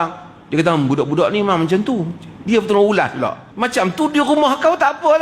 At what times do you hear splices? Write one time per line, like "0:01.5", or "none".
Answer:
0:03.4